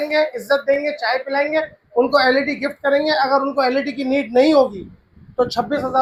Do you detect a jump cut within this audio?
no; 0 cuts

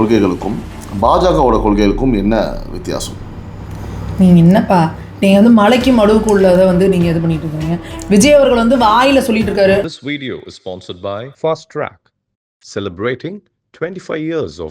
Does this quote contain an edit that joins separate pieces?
yes; 1 cut; at 9.9 s

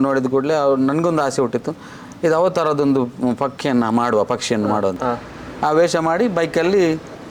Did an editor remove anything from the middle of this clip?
yes; 1 cut; at 5.0 s

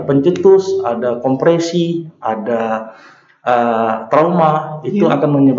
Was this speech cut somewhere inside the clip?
no; 0 cuts

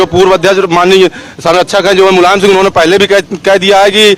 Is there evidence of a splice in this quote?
no; 0 cuts

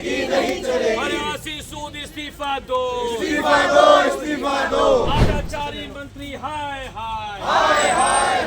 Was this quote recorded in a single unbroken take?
no; 1 cut; at 5.2 s

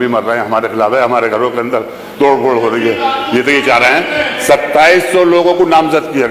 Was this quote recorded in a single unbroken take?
yes; 0 cuts

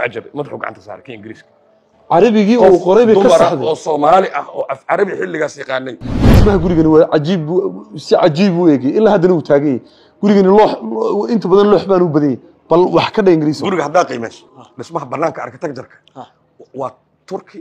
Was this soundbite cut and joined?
yes; 1 cut; at 6.0 s

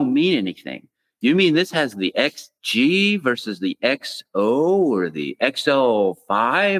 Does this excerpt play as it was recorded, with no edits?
yes; 0 cuts

